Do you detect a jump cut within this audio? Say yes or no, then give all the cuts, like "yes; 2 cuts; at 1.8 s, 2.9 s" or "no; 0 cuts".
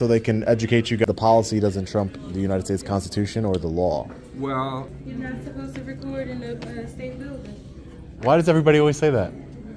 yes; 2 cuts; at 1.0 s, 5.0 s